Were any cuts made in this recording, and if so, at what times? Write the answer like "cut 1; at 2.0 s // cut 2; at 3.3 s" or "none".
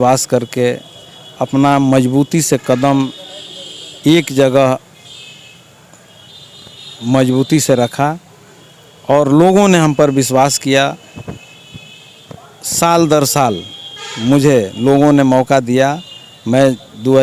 none